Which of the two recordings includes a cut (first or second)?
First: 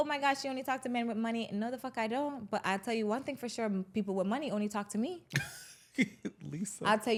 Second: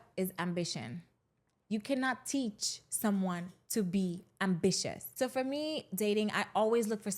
second